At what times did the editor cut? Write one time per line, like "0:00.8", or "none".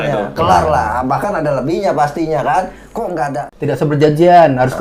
0:03.5